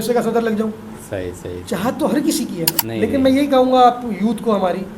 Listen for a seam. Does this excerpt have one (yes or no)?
yes